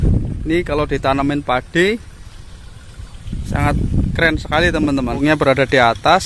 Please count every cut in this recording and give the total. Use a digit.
1